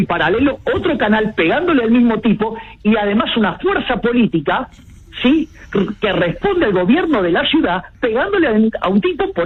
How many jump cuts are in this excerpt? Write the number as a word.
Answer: zero